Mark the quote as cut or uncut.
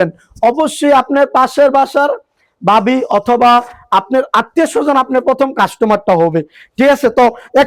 uncut